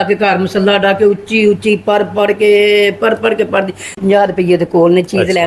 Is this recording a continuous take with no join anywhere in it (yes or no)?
no